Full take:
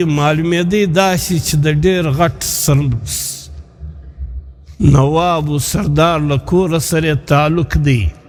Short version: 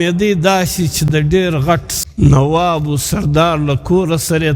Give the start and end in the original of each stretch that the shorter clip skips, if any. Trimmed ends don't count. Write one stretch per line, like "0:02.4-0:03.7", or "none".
0:02.5-0:04.6